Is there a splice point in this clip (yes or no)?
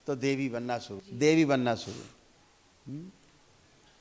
yes